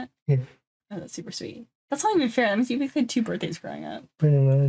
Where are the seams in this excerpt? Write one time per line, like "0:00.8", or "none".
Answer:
none